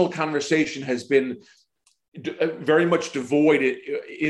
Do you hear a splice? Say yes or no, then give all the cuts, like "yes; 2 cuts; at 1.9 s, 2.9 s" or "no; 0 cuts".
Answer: no; 0 cuts